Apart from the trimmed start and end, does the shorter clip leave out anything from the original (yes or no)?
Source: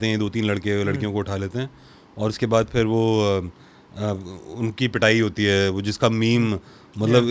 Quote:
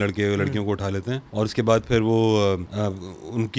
yes